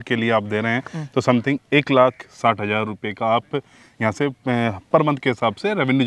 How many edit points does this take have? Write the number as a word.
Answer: zero